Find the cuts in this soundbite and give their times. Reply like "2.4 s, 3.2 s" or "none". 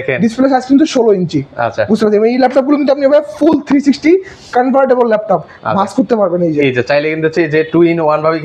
none